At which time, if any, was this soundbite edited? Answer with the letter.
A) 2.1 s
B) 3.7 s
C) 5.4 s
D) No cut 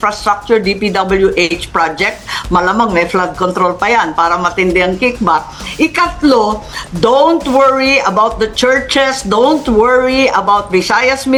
D